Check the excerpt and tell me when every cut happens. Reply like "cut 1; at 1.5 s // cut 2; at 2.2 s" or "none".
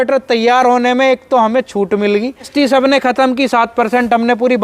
cut 1; at 2.5 s